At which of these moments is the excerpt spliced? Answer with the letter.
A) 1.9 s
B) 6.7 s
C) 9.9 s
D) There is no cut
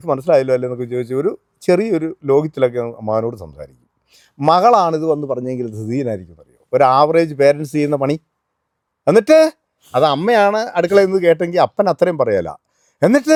D